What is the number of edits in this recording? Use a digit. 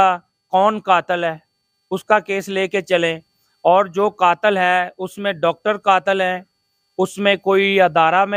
0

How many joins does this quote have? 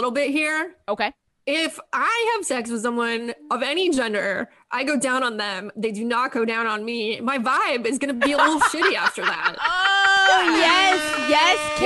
0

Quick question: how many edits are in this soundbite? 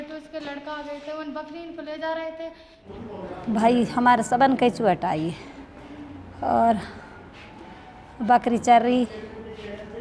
1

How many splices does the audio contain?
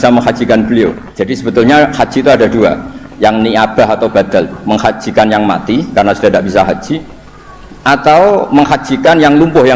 1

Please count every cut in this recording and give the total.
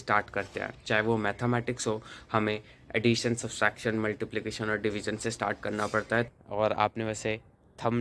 1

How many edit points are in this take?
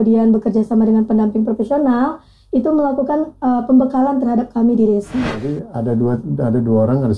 1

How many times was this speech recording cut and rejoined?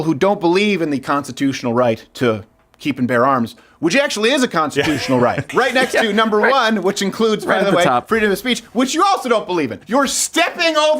2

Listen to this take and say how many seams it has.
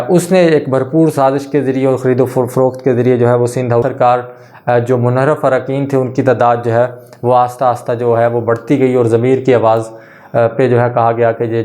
1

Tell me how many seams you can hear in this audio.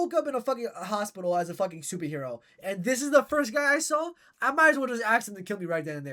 0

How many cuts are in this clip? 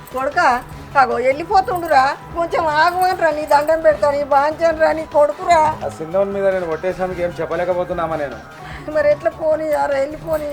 1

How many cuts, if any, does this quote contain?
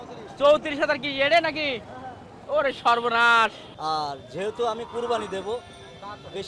1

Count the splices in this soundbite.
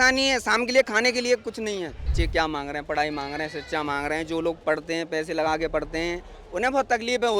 1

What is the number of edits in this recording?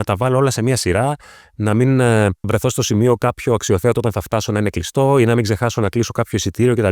0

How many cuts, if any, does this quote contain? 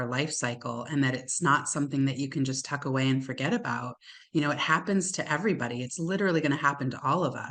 0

